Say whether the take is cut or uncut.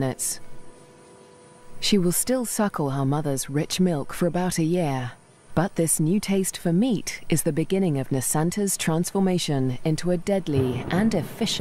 uncut